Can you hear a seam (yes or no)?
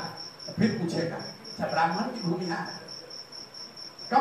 no